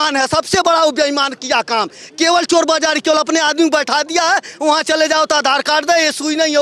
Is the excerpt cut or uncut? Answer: uncut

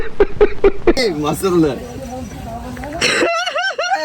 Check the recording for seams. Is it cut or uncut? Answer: cut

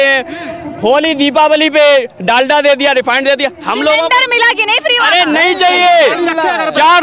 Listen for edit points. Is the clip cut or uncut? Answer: uncut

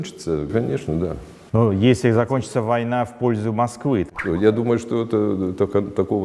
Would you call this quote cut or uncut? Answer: cut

